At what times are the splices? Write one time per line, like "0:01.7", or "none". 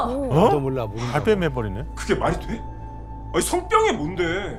none